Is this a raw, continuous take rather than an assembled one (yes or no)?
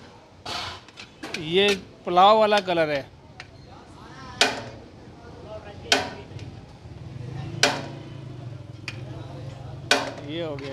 yes